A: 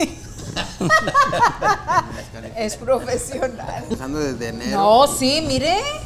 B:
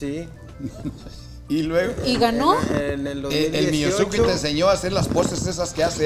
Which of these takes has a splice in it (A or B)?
A